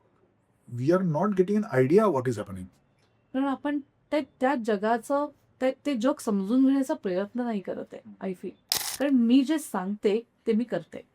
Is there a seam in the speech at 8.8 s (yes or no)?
yes